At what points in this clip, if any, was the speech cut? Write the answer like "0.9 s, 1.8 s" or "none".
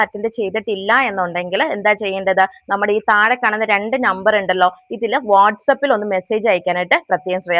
none